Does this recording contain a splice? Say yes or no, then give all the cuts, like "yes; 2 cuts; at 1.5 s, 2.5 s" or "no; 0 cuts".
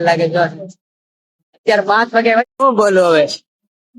yes; 1 cut; at 2.4 s